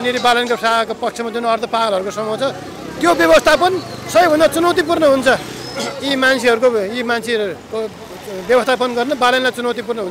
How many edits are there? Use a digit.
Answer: 0